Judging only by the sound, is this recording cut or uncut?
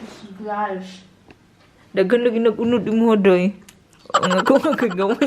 uncut